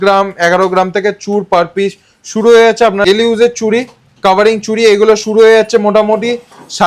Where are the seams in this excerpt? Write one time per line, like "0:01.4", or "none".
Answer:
0:03.1